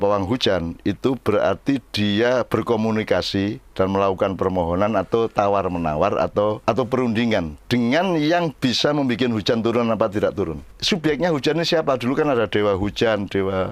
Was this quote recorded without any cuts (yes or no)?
no